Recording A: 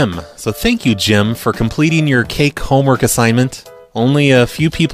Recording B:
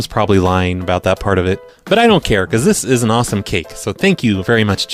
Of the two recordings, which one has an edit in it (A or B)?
A